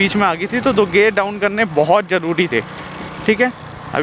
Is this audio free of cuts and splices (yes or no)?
yes